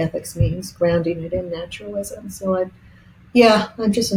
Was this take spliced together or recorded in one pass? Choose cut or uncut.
uncut